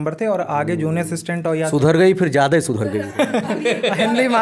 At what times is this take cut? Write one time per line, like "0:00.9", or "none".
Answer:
none